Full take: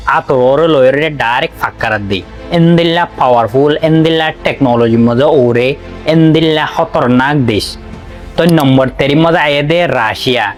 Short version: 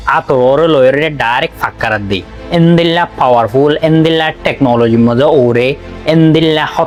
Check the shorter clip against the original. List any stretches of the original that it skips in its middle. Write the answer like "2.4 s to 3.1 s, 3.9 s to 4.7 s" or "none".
none